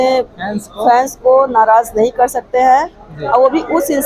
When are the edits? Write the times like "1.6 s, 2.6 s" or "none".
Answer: none